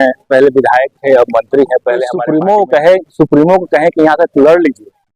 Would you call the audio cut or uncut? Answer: cut